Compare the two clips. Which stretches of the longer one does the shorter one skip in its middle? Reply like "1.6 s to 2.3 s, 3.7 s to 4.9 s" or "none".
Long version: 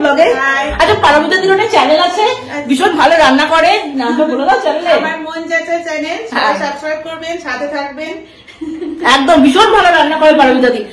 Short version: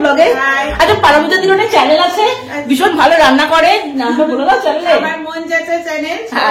none